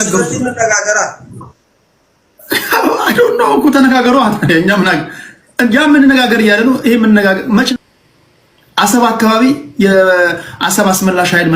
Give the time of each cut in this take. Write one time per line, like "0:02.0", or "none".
0:07.7